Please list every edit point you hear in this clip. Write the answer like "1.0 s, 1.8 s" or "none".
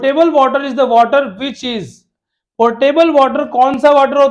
none